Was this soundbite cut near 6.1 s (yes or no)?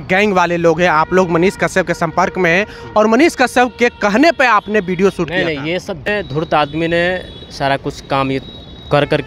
yes